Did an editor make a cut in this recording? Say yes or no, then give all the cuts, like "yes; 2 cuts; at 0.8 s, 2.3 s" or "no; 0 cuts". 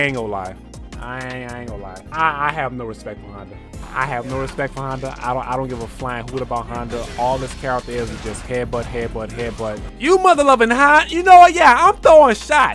yes; 2 cuts; at 2.0 s, 9.9 s